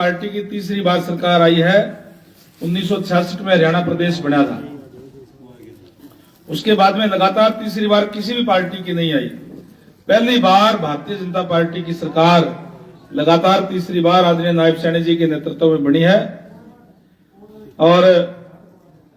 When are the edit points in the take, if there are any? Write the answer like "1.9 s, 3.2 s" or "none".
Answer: none